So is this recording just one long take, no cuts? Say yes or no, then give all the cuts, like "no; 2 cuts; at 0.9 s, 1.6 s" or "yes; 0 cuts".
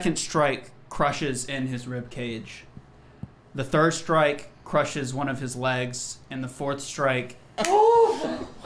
no; 1 cut; at 7.5 s